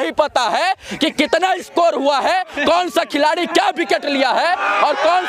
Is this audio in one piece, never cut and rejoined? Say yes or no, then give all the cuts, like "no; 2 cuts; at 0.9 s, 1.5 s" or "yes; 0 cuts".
yes; 0 cuts